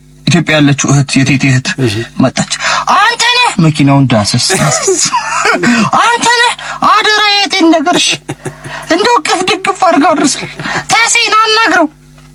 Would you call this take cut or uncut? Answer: uncut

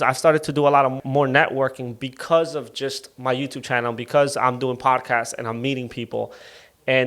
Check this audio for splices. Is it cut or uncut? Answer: cut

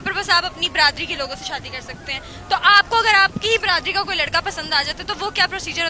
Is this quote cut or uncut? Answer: uncut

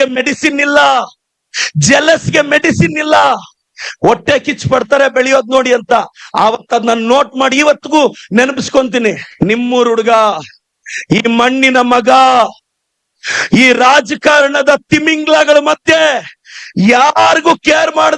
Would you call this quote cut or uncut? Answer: cut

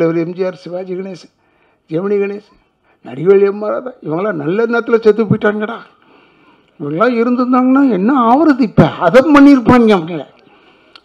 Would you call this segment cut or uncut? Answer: uncut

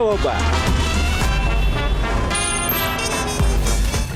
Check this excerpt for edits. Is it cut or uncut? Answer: uncut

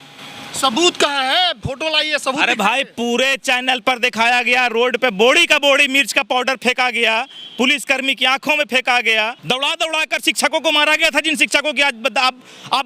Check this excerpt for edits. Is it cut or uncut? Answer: cut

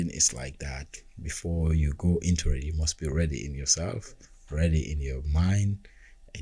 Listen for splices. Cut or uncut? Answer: uncut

